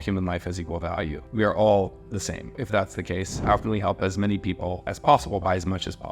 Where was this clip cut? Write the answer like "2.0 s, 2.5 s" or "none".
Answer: 1.2 s, 2.6 s, 4.9 s